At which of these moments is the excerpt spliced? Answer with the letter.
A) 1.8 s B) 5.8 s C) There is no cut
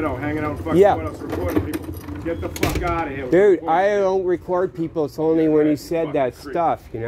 C